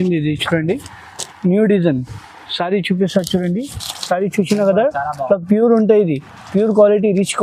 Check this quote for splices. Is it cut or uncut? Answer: uncut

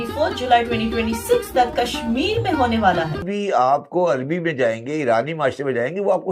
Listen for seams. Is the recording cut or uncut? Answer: cut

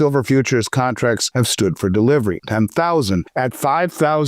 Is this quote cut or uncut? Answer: cut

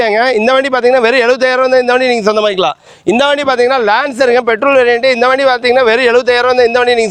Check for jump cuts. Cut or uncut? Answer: uncut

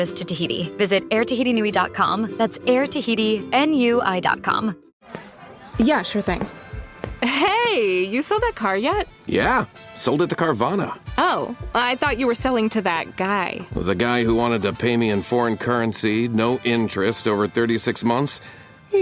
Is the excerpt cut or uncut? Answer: cut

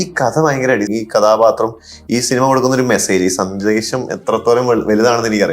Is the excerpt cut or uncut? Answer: cut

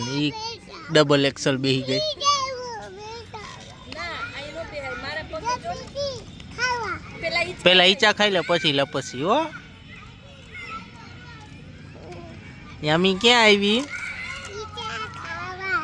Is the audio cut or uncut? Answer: uncut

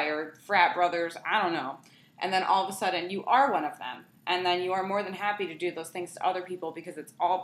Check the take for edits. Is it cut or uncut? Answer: uncut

